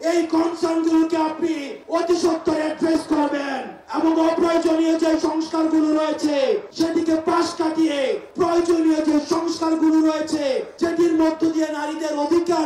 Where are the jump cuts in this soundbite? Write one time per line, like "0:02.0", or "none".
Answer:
none